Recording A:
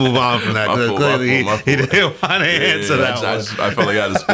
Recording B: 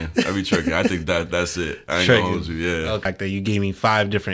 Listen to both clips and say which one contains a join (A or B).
B